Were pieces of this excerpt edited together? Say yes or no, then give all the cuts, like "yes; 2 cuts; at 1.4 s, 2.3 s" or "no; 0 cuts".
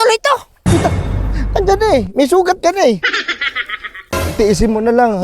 yes; 1 cut; at 4.1 s